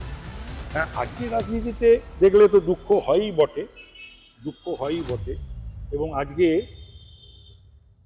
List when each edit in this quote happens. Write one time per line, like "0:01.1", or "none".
none

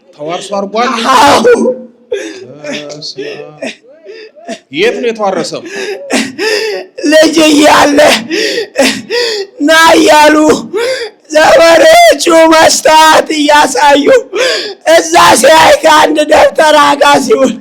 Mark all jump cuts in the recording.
none

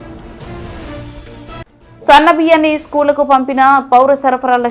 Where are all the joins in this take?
0:01.7

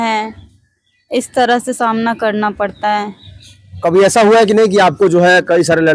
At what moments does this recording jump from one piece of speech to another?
none

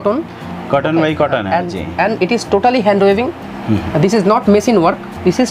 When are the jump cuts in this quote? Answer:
none

